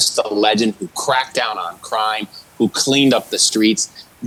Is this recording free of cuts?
yes; 0 cuts

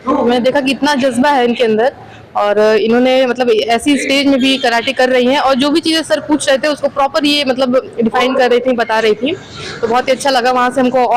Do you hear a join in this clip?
no; 0 cuts

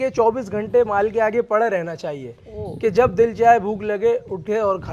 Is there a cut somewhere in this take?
no; 0 cuts

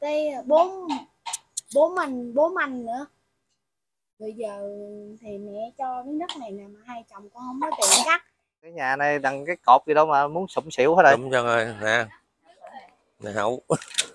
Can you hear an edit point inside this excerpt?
yes; 1 cut; at 8.7 s

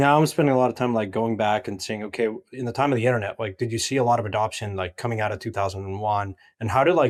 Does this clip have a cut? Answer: no; 0 cuts

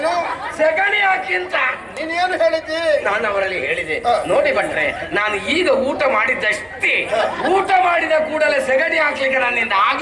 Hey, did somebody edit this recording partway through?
no; 0 cuts

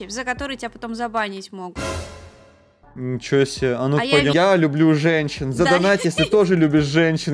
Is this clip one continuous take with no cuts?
no; 1 cut; at 4.3 s

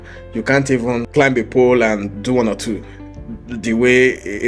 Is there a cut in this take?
yes; 1 cut; at 1.1 s

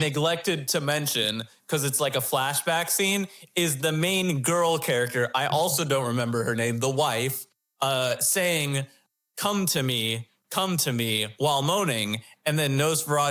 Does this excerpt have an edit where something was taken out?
no; 0 cuts

